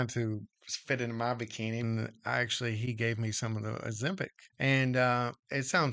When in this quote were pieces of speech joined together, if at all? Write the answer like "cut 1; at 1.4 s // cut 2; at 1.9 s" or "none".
cut 1; at 1.8 s // cut 2; at 4.4 s